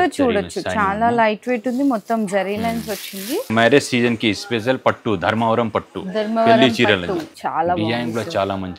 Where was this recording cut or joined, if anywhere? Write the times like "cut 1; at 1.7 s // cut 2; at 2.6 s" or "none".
cut 1; at 3.5 s // cut 2; at 7.3 s